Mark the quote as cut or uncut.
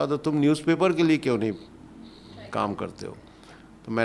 uncut